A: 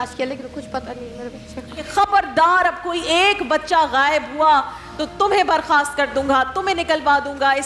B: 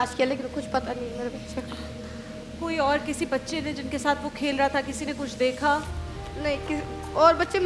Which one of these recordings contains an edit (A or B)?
A